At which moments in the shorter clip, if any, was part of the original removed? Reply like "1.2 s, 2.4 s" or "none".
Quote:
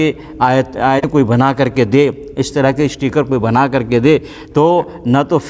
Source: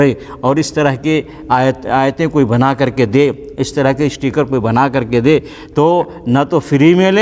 1.1 s